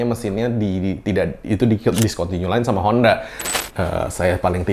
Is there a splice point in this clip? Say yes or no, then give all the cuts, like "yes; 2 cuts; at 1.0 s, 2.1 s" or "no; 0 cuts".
yes; 1 cut; at 3.5 s